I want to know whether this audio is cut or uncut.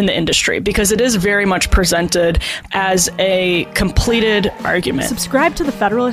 cut